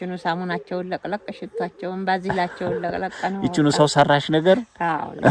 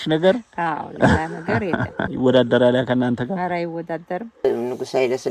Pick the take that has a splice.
second; 2 cuts; at 2.1 s, 4.4 s

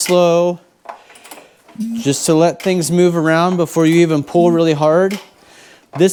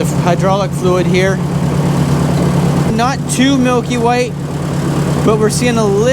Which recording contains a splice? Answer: second; 1 cut; at 2.9 s

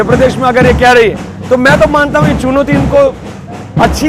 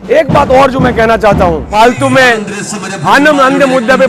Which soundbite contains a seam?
second; 1 cut; at 1.7 s

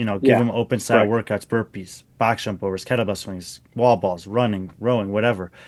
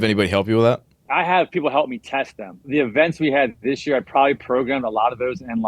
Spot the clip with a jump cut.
second; 2 cuts; at 0.9 s, 2.7 s

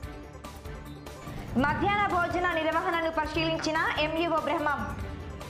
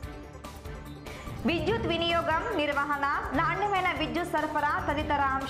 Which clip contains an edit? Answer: second; 1 cut; at 1.0 s

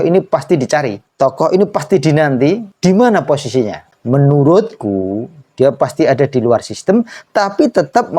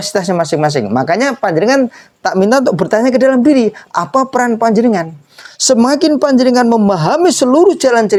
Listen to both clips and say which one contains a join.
first; 3 cuts; at 1.0 s, 2.7 s, 3.9 s

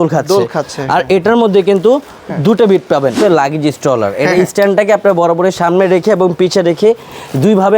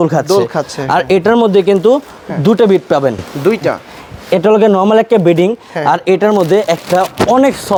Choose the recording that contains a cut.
first; 1 cut; at 3.2 s

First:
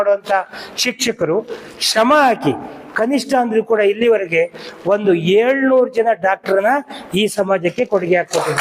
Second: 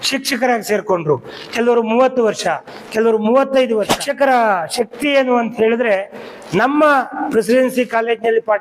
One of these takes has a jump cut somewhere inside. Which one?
second; 1 cut; at 4.0 s

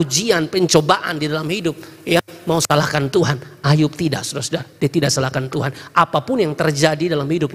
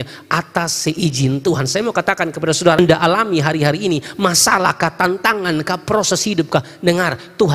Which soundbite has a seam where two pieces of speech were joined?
second; 1 cut; at 2.8 s

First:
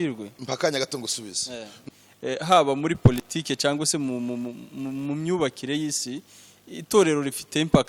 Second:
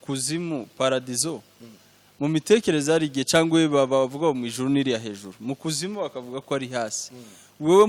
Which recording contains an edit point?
first; 1 cut; at 1.8 s

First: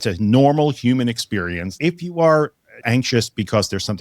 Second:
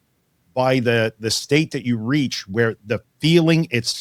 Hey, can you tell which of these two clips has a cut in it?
first; 2 cuts; at 1.7 s, 2.8 s

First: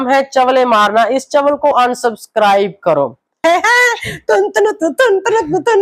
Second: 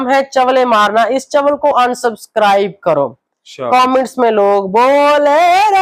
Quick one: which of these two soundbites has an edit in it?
first; 1 cut; at 3.4 s

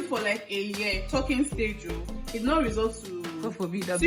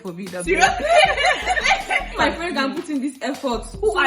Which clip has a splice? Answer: second; 1 cut; at 2.1 s

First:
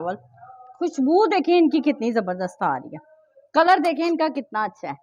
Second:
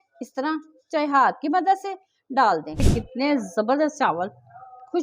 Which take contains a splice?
second; 1 cut; at 2.9 s

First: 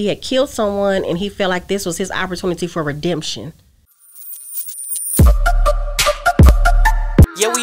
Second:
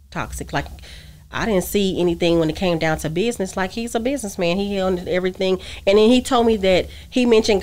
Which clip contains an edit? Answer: first; 1 cut; at 3.9 s

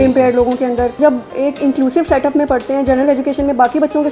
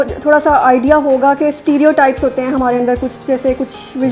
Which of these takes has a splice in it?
first; 1 cut; at 1.0 s

